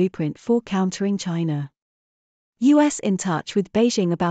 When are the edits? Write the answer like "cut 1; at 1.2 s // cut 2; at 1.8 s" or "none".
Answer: cut 1; at 2.5 s